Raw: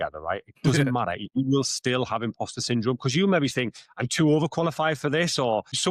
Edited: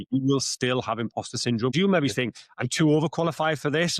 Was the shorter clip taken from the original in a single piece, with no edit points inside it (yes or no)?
no